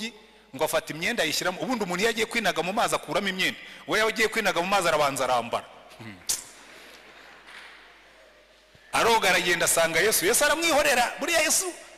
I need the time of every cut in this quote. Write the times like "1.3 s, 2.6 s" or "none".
none